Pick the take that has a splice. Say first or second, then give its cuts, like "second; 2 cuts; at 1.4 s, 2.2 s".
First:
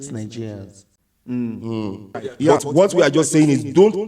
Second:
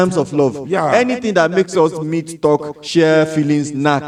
first; 1 cut; at 2.5 s